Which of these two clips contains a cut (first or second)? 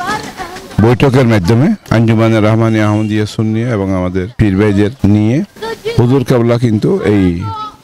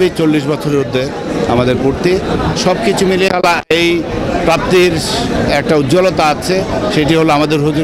first